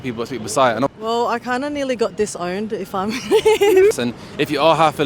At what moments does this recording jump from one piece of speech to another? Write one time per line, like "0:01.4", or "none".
0:00.9
0:03.9